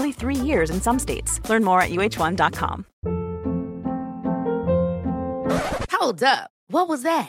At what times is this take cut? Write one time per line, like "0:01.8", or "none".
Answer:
0:02.9